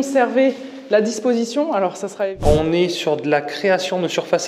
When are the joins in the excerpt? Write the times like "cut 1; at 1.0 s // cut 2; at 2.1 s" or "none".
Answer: cut 1; at 2.4 s